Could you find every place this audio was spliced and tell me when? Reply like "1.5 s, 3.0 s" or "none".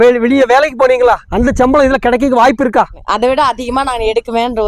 1.3 s, 3.0 s

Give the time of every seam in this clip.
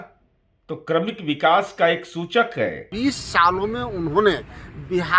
2.9 s

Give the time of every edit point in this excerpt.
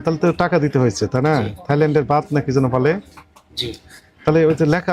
none

